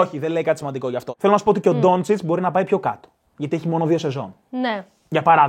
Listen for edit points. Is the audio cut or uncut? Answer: cut